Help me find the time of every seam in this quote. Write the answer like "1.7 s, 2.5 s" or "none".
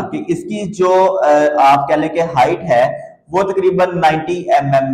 none